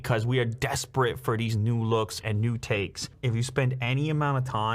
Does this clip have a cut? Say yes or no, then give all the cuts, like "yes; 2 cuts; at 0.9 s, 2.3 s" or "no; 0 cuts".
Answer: yes; 1 cut; at 3.1 s